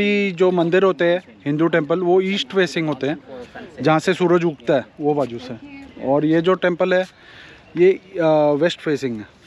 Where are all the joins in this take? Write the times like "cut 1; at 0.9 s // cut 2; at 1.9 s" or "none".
none